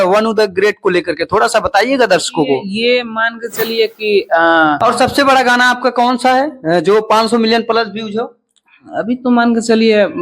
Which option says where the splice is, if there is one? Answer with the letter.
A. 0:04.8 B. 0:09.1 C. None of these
A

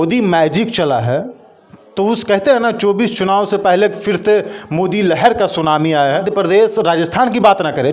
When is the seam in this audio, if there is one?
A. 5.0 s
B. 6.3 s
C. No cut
B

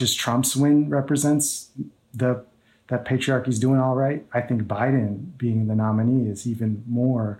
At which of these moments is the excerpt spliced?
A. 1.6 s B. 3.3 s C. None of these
C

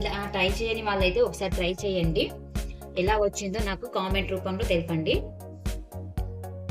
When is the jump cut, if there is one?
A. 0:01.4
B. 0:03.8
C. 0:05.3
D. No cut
C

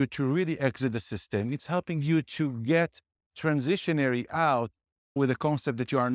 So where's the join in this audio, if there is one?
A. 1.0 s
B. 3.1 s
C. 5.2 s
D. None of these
C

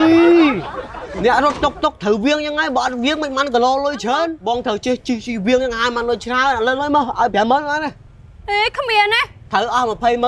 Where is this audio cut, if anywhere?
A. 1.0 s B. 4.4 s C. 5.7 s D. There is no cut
B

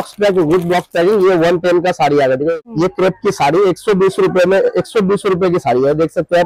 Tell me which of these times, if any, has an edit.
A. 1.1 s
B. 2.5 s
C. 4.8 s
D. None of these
B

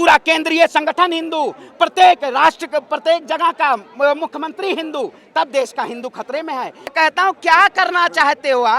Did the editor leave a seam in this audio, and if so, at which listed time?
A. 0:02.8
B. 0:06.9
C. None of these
B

